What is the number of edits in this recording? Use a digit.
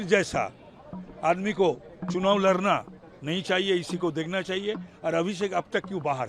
0